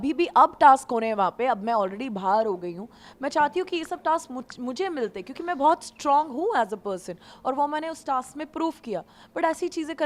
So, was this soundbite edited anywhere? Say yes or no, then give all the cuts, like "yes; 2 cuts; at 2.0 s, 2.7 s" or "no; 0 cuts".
no; 0 cuts